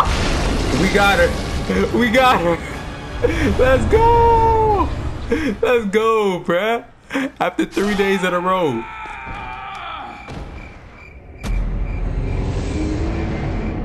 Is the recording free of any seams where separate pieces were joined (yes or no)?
yes